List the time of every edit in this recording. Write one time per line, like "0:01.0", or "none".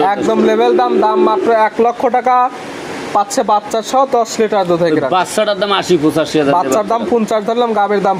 none